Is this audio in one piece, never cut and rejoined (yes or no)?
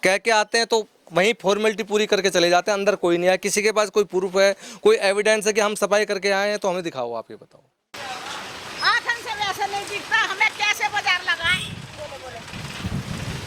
no